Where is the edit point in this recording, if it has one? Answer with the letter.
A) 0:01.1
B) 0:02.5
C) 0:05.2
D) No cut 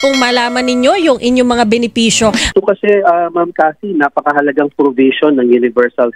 B